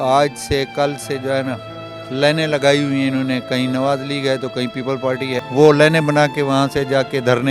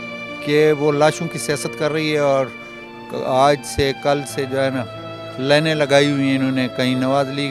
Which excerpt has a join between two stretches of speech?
first; 1 cut; at 5.4 s

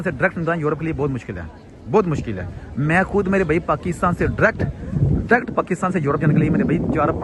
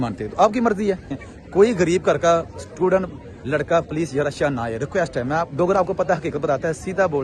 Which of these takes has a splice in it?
second; 1 cut; at 1.2 s

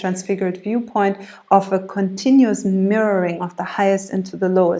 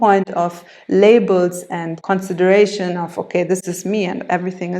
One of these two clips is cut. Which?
second; 2 cuts; at 2.0 s, 3.7 s

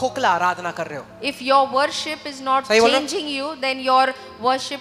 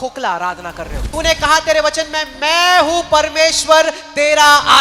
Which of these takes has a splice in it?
second; 1 cut; at 1.0 s

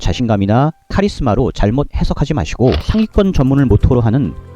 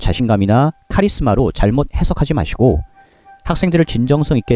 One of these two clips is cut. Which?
first; 1 cut; at 2.9 s

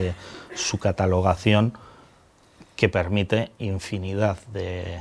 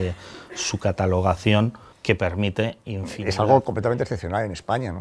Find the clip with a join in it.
second; 2 cuts; at 1.9 s, 3.1 s

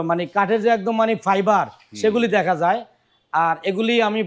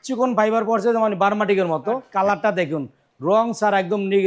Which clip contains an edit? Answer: second; 1 cut; at 2.1 s

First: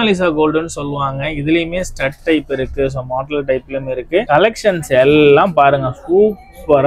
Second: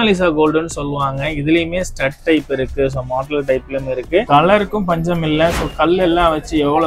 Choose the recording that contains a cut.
second; 1 cut; at 4.2 s

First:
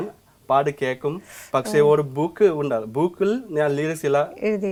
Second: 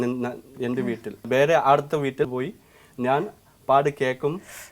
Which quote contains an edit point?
second; 2 cuts; at 1.2 s, 2.3 s

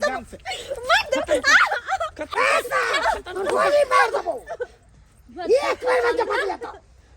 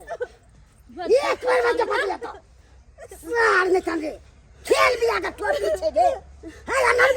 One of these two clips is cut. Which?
first; 1 cut; at 2.2 s

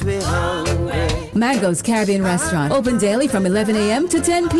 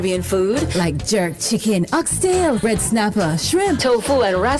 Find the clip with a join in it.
second; 1 cut; at 1.9 s

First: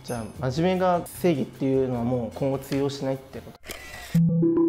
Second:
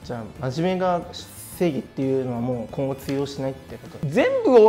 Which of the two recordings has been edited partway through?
first; 2 cuts; at 1.1 s, 3.6 s

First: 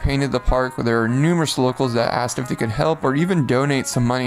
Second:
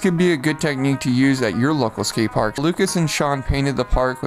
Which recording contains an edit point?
second; 1 cut; at 2.5 s

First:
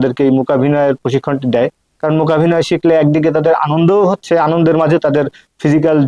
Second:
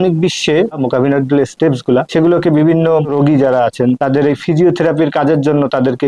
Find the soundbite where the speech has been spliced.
second; 4 cuts; at 0.8 s, 2.1 s, 3.1 s, 4.0 s

